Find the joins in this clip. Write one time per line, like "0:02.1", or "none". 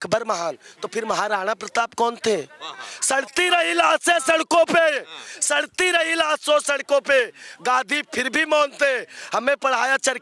none